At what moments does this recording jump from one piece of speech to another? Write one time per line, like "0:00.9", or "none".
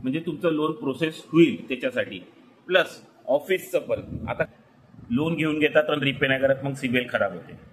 0:04.5